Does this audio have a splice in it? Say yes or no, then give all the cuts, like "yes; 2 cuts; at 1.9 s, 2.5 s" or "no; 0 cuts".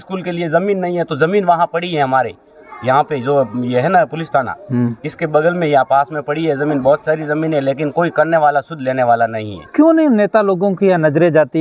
no; 0 cuts